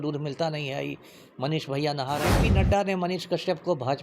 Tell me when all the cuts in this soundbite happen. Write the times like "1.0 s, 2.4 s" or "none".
2.4 s